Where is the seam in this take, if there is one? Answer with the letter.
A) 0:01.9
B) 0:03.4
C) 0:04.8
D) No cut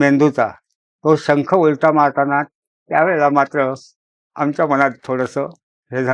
D